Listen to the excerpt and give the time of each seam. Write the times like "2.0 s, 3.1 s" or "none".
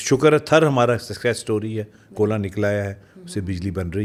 none

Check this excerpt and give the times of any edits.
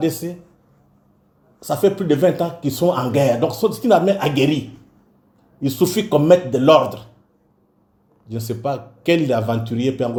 none

